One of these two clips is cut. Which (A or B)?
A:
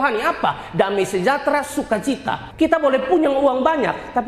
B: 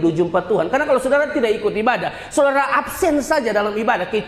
A